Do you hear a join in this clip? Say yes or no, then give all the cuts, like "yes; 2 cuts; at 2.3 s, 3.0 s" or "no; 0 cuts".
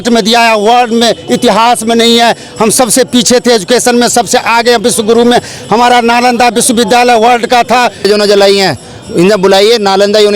yes; 1 cut; at 8.1 s